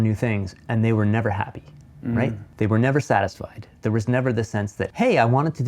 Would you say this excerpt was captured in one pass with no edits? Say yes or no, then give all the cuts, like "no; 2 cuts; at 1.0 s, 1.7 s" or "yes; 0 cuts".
no; 2 cuts; at 2.4 s, 4.8 s